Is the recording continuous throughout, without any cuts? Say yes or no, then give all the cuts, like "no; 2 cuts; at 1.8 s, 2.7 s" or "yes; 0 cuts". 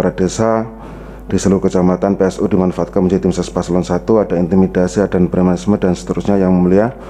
yes; 0 cuts